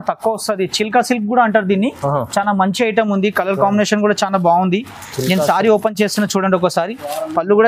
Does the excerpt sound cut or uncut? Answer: uncut